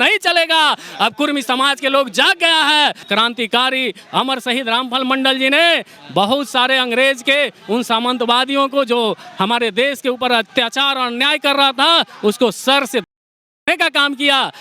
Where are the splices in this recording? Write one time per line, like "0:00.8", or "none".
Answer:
0:03.1

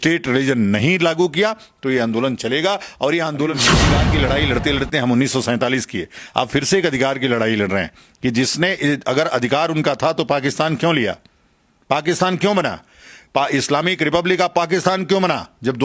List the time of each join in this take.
0:03.8

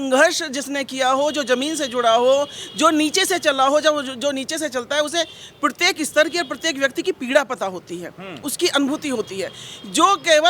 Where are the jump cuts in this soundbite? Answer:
none

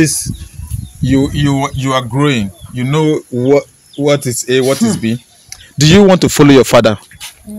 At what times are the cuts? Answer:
none

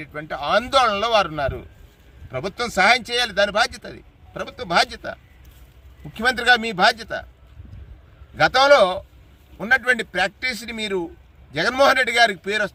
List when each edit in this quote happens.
none

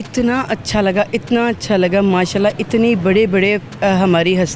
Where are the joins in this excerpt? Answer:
none

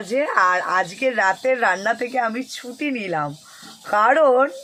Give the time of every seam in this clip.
none

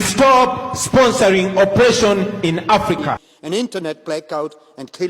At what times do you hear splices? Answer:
0:03.3

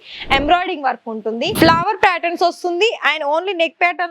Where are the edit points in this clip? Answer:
0:01.5

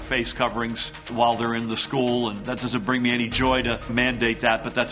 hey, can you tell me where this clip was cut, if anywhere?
0:01.1
0:02.4
0:03.9

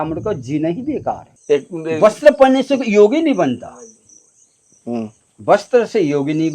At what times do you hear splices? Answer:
0:01.3

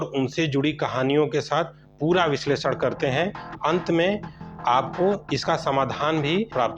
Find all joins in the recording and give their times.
none

